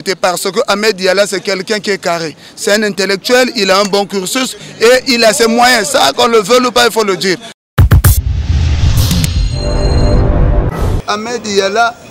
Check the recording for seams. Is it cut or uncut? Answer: cut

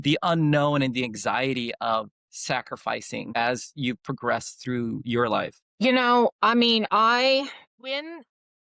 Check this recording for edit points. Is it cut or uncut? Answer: cut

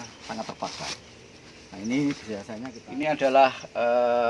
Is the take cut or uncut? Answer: cut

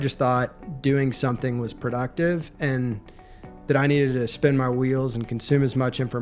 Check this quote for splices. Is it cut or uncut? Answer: uncut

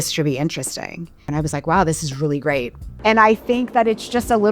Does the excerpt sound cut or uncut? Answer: cut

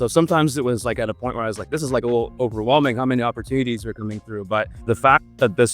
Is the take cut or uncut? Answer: cut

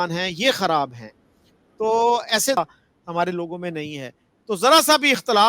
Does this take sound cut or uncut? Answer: cut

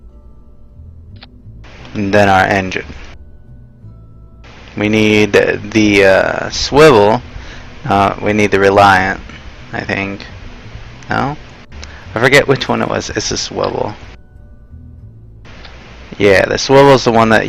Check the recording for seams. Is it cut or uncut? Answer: uncut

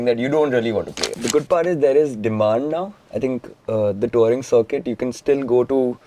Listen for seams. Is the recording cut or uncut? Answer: cut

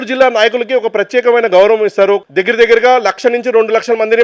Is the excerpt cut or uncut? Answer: cut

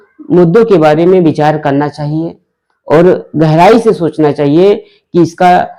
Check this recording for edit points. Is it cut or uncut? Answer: uncut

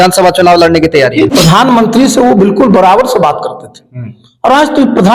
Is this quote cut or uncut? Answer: cut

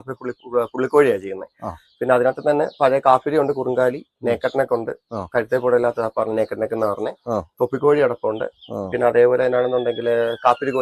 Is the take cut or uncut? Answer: uncut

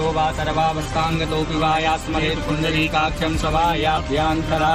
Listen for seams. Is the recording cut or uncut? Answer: cut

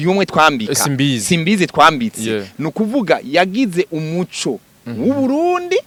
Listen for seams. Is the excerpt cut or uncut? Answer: uncut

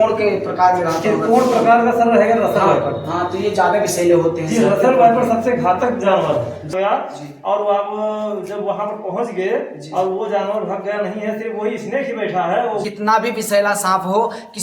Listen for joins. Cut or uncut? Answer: cut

